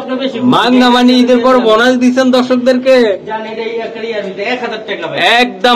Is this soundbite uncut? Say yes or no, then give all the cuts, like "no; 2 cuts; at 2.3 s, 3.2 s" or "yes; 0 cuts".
yes; 0 cuts